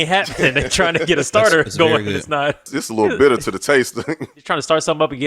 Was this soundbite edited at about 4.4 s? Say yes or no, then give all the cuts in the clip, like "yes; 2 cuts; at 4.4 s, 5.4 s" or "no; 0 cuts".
yes; 2 cuts; at 2.8 s, 4.4 s